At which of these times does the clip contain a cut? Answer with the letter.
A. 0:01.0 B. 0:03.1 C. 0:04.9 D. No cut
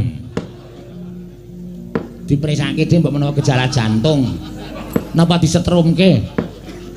B